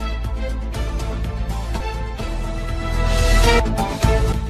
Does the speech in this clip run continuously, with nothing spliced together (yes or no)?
no